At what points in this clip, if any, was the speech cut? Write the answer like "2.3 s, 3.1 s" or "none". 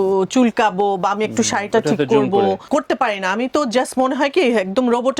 2.6 s